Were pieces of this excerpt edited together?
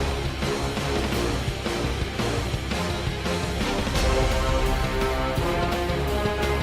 no; 0 cuts

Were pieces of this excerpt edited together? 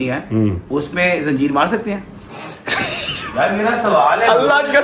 no; 0 cuts

